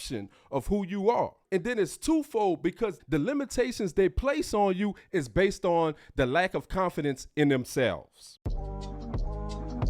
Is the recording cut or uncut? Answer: cut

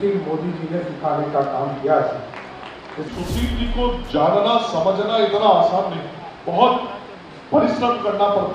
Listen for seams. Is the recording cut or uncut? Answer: cut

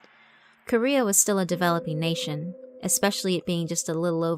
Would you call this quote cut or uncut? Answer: uncut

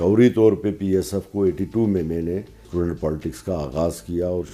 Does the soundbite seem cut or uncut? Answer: cut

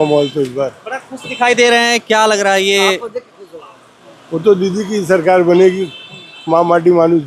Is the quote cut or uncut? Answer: uncut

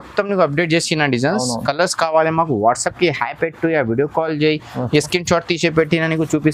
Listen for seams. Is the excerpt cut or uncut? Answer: uncut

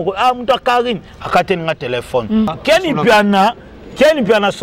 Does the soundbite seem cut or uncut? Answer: cut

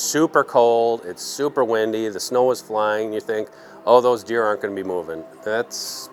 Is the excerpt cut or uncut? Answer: uncut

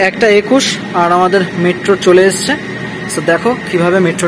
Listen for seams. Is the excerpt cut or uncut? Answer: uncut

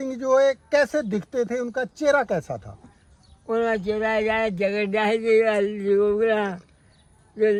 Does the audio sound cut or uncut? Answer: uncut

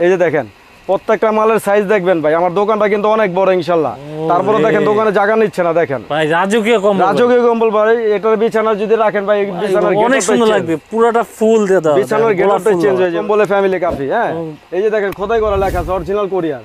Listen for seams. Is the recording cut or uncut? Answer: cut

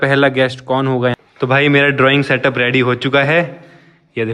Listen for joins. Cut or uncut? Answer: cut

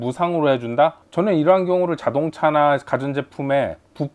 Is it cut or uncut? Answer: uncut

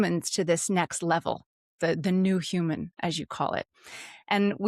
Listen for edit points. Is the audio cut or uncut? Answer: uncut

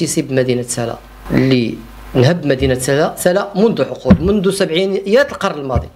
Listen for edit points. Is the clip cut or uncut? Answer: cut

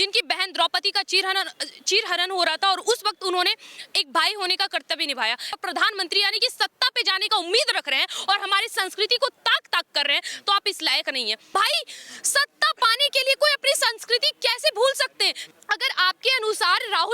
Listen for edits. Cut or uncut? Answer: cut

